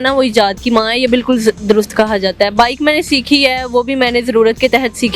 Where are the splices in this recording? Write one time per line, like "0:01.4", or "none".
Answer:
none

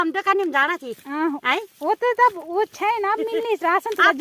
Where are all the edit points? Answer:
none

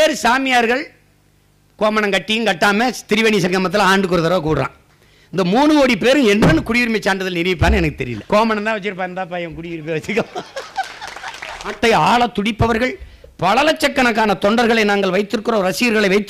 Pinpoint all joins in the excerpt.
0:08.1
0:11.8

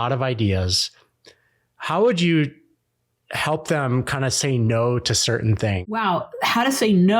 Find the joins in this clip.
0:05.9

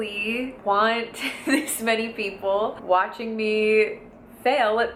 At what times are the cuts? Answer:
none

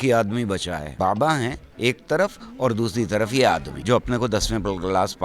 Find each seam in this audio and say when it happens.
0:00.9
0:01.6
0:03.7

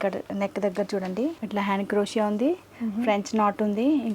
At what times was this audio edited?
0:01.4

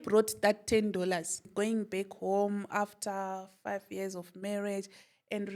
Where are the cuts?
0:01.4

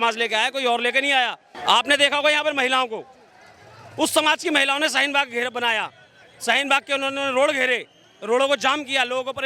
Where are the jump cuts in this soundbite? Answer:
0:01.5

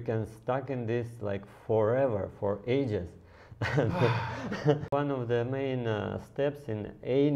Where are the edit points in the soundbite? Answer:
0:04.9

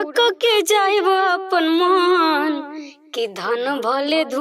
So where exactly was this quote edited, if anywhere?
none

